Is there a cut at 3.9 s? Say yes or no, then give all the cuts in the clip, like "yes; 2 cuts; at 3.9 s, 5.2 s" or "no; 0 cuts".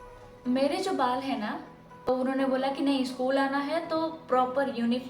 no; 1 cut; at 2.1 s